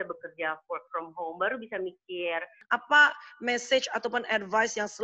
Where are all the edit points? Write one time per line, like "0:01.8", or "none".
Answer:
0:02.5